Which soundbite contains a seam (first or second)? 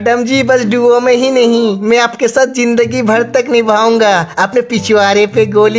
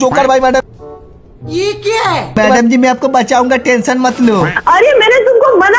second